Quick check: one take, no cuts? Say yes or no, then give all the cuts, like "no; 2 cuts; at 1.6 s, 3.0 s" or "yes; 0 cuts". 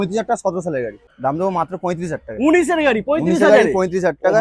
no; 1 cut; at 1.0 s